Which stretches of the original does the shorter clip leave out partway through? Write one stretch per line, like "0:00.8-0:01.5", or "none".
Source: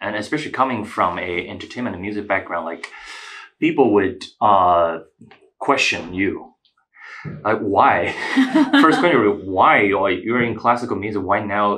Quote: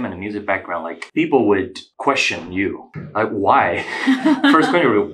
0:02.8-0:03.5
0:04.2-0:05.4
0:06.5-0:07.2